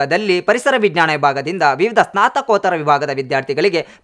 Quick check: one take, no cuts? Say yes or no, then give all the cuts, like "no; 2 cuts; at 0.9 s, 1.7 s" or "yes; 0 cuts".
yes; 0 cuts